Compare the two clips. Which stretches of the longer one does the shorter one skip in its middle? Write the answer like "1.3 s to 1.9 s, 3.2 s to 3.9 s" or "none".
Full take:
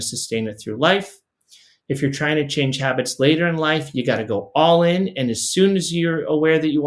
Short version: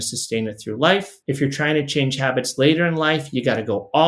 1.1 s to 1.7 s